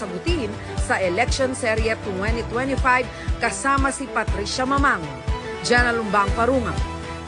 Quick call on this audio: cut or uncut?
uncut